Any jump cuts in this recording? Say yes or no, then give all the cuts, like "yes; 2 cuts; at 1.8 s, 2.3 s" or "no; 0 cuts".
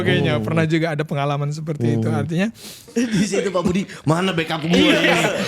yes; 1 cut; at 2.9 s